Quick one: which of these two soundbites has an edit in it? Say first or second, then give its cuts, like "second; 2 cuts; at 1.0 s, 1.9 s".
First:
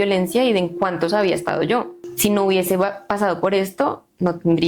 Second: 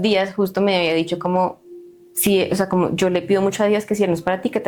first; 1 cut; at 2.0 s